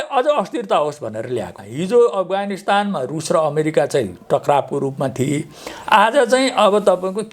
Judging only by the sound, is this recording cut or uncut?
cut